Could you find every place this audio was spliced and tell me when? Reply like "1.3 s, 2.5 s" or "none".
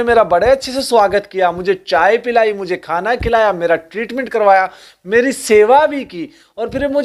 none

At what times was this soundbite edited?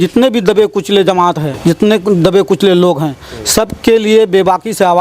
1.5 s

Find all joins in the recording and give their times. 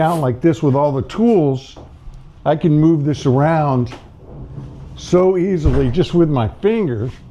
none

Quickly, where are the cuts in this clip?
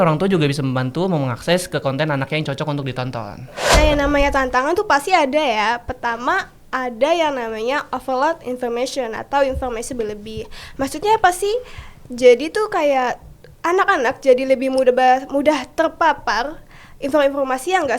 3.6 s

